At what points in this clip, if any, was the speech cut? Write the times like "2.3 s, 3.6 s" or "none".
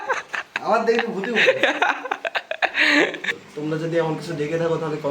3.5 s